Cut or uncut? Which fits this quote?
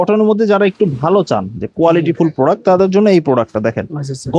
uncut